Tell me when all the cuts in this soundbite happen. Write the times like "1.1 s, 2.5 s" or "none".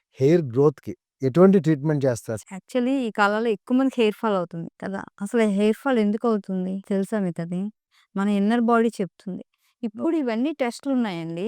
none